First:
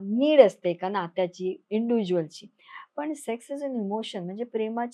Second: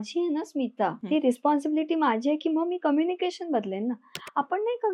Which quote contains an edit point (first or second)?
second